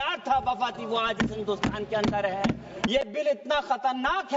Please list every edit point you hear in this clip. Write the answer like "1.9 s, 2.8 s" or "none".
2.9 s